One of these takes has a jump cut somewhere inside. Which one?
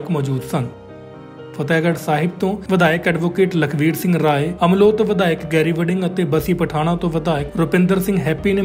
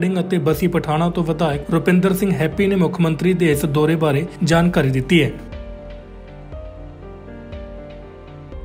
second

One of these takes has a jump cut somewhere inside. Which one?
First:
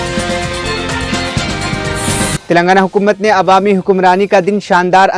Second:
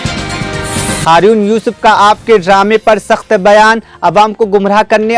second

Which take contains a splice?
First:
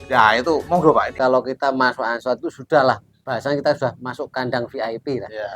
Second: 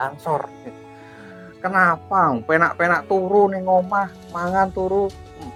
first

